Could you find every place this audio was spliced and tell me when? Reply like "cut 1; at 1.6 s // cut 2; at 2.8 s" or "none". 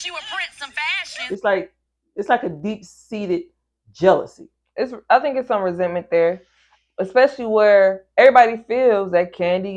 cut 1; at 1.2 s